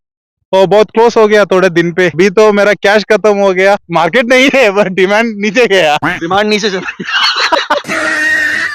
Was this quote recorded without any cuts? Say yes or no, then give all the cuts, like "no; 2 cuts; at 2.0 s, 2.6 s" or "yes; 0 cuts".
no; 3 cuts; at 2.2 s, 3.9 s, 7.8 s